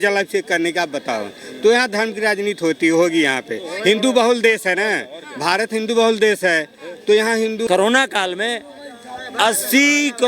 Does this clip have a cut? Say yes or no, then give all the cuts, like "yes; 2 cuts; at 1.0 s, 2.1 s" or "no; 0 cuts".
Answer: yes; 1 cut; at 7.6 s